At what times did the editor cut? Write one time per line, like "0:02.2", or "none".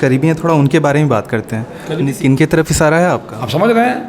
0:02.0